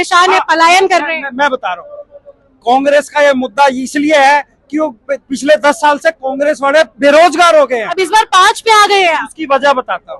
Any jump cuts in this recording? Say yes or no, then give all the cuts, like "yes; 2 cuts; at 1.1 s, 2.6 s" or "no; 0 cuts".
yes; 1 cut; at 7.9 s